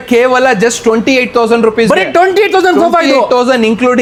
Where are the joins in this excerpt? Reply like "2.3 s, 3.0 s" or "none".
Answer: none

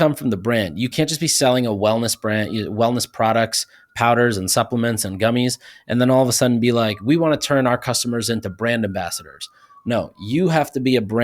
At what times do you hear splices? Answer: 0.9 s

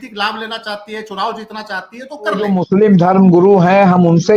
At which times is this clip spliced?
2.4 s

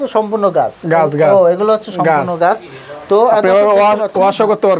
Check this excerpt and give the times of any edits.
none

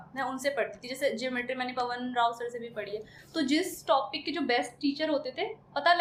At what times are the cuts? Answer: none

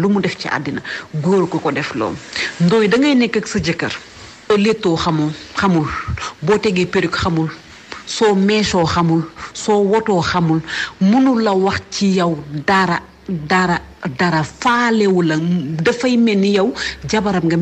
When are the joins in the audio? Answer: 4.5 s

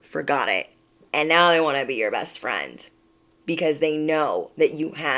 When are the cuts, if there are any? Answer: none

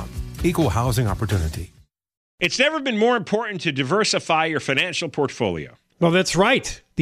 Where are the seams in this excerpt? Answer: 2.2 s

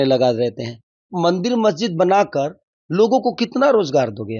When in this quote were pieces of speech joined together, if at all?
1.1 s

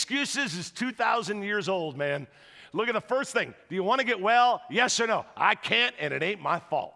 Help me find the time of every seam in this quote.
none

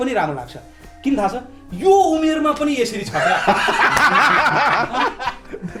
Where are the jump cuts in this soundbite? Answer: none

